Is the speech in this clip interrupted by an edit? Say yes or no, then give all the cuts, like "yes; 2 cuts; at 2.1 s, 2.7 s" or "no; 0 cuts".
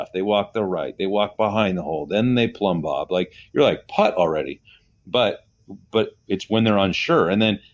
no; 0 cuts